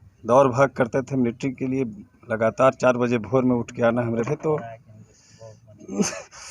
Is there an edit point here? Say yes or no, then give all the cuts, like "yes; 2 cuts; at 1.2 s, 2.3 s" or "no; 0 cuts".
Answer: yes; 1 cut; at 4.3 s